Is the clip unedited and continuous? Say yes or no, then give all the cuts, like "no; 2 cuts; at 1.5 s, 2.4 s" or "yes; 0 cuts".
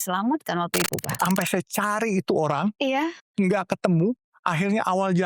no; 1 cut; at 1.1 s